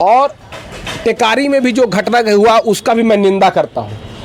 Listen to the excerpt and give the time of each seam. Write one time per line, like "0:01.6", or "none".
none

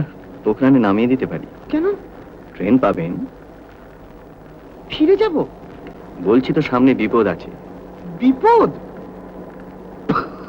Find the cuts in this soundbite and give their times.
none

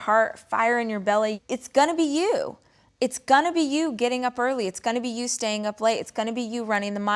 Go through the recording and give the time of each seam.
0:01.4

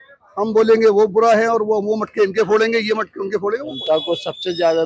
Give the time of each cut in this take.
0:03.7

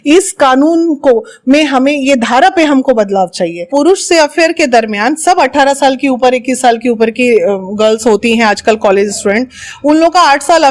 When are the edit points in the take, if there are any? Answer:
0:03.6

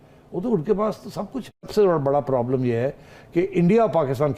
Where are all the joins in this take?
0:01.7

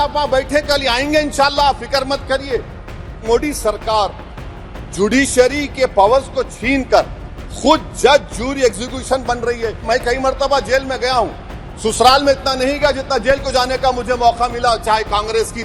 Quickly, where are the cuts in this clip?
0:03.2
0:09.9

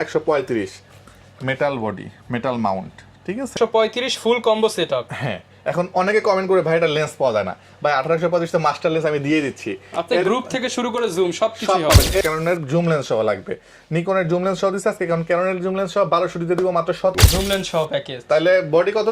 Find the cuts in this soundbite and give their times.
0:03.5
0:12.2
0:17.1

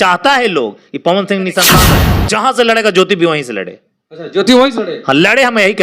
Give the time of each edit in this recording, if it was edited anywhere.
0:01.8

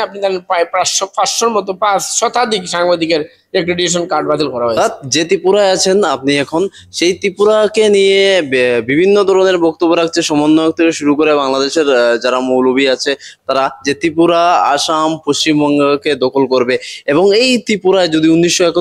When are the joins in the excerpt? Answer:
0:04.8

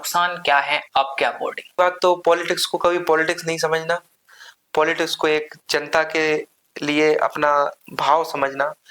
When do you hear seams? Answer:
0:01.8

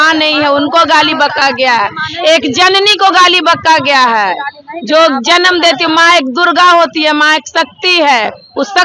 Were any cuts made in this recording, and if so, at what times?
none

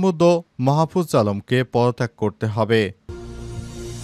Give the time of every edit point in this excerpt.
0:03.0

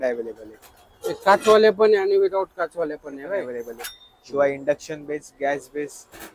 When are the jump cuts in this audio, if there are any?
0:03.5

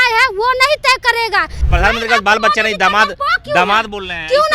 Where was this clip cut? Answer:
0:01.6

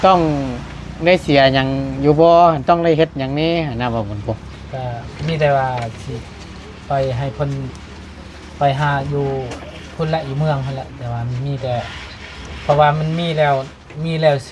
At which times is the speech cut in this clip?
none

